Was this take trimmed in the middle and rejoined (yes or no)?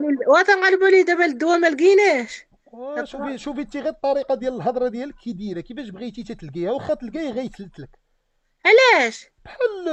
no